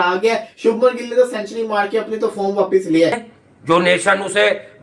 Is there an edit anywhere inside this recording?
yes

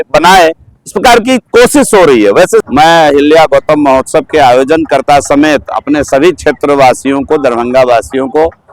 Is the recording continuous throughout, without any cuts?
no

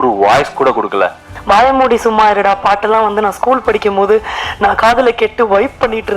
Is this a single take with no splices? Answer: no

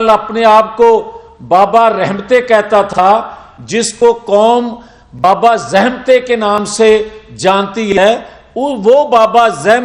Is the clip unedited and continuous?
yes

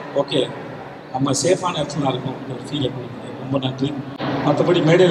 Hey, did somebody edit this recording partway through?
no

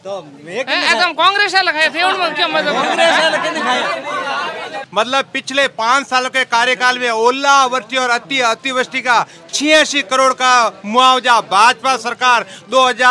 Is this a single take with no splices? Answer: no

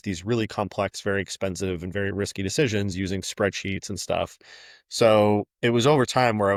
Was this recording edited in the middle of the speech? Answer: no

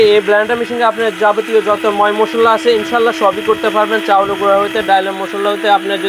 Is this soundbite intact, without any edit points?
yes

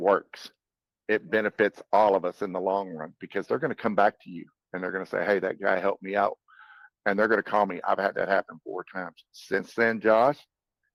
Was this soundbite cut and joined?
no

